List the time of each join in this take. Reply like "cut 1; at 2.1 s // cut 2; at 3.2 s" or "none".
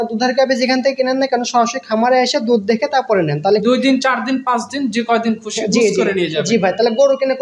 none